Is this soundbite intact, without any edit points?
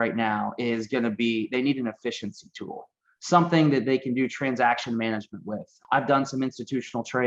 no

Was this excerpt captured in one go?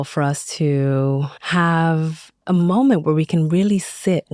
no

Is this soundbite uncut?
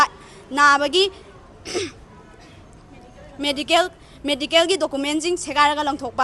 yes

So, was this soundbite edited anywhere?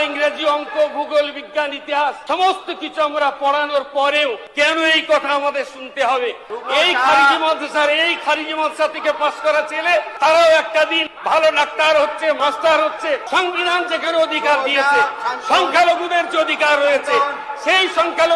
yes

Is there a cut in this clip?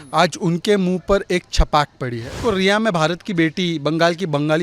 yes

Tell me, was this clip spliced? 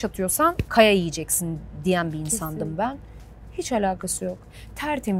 no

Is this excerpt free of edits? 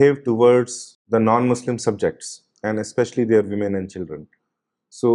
no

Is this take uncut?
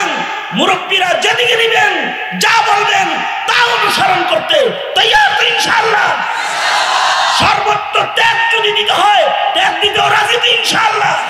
yes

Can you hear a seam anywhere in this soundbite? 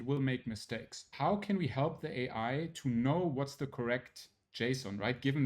yes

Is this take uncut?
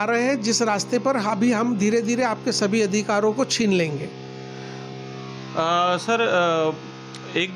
yes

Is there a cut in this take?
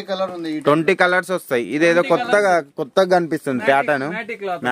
no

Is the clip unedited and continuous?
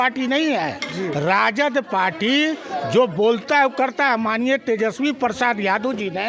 yes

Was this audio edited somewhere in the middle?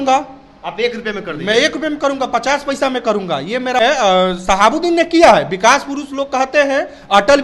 yes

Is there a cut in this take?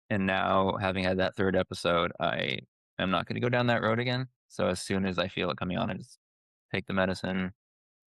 yes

